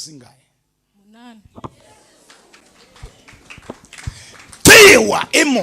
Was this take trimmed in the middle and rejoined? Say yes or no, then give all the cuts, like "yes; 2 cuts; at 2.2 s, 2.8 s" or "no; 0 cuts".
no; 0 cuts